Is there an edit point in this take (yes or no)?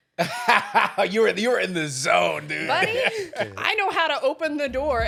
no